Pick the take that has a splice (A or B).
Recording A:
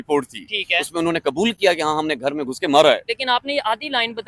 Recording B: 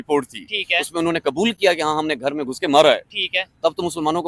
A